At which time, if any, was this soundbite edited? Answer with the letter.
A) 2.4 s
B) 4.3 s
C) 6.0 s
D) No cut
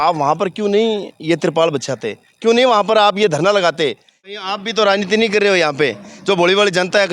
B